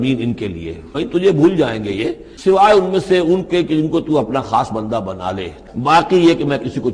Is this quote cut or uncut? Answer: cut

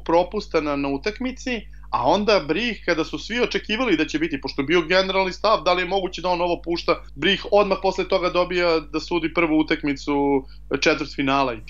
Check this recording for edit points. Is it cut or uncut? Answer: cut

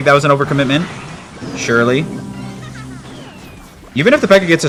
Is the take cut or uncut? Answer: uncut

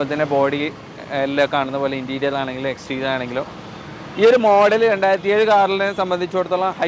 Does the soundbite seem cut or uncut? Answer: uncut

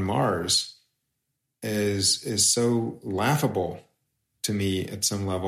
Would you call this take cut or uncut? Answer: uncut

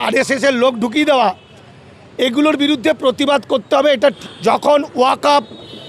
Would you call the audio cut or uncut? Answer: cut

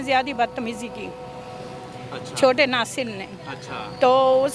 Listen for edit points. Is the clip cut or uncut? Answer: uncut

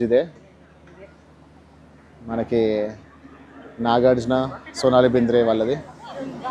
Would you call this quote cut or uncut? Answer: uncut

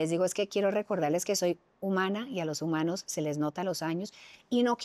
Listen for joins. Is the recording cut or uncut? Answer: uncut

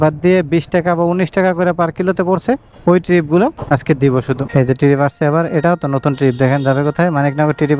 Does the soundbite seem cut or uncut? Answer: uncut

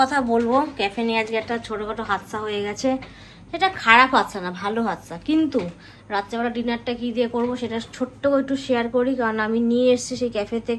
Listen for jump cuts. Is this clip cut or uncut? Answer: uncut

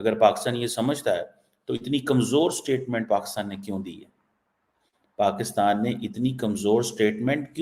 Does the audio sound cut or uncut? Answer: uncut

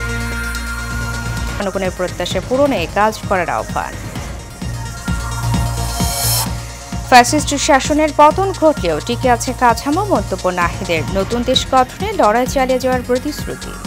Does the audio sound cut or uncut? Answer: cut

